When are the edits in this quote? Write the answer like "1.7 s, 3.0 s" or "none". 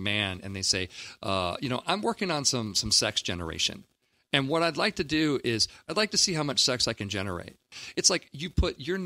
7.6 s